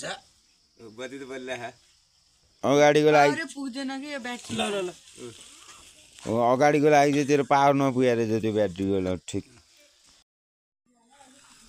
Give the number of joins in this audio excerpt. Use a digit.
0